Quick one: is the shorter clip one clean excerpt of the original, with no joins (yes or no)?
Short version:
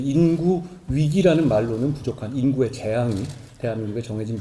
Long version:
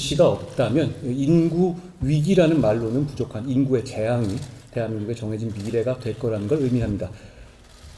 yes